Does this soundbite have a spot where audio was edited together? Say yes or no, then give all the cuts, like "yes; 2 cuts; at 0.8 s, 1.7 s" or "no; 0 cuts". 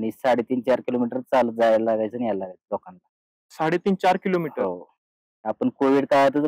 no; 0 cuts